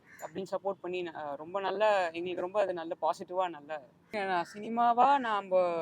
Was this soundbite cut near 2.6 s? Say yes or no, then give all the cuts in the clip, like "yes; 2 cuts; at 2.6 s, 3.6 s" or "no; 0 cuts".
no; 1 cut; at 4.0 s